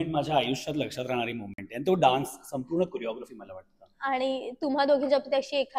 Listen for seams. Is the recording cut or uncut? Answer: uncut